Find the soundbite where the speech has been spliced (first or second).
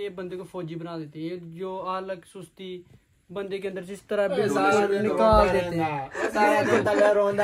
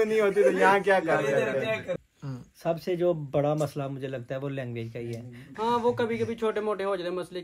second